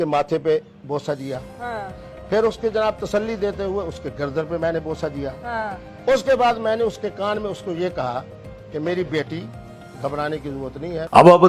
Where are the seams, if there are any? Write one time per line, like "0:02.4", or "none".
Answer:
none